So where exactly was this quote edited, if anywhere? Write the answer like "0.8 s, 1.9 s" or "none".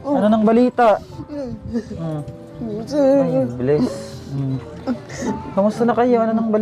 none